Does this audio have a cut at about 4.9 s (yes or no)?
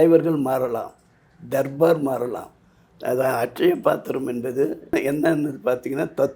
yes